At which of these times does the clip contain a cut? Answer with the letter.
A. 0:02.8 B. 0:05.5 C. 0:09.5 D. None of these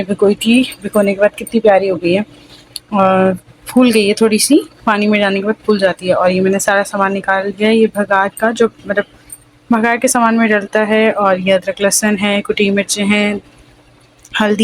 D